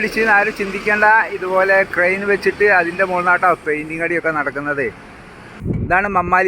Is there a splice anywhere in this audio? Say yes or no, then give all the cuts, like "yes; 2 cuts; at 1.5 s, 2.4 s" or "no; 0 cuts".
yes; 1 cut; at 5.6 s